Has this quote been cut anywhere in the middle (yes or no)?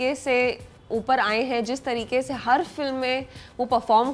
no